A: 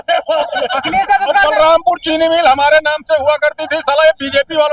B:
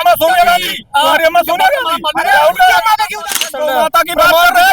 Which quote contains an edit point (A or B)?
B